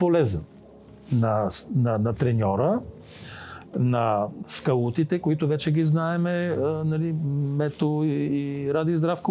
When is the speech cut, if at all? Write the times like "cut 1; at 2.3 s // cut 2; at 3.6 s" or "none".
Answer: cut 1; at 4.4 s